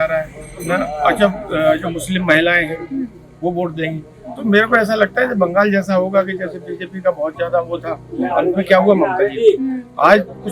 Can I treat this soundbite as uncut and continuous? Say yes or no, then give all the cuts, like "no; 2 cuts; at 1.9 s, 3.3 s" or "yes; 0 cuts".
yes; 0 cuts